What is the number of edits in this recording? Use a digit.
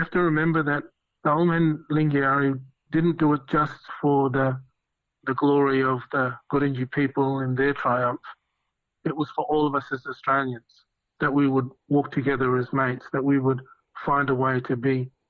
0